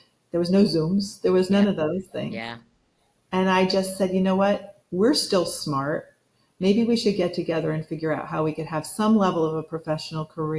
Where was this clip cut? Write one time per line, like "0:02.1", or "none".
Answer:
none